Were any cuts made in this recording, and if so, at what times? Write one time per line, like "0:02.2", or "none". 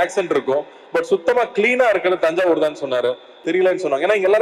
0:03.3